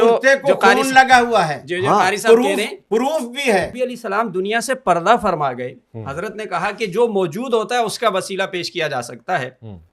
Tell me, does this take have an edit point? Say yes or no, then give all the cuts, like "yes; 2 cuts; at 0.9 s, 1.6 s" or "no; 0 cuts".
yes; 1 cut; at 3.7 s